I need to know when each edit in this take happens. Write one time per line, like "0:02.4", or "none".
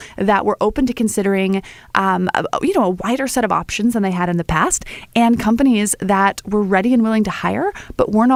none